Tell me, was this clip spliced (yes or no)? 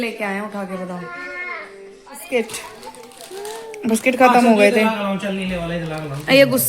yes